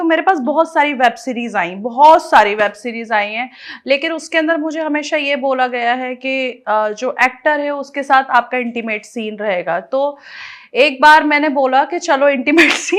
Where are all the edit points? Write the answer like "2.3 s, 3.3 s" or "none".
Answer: none